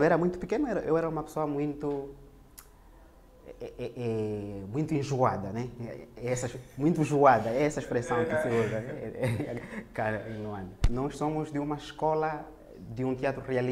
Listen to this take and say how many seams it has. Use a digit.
1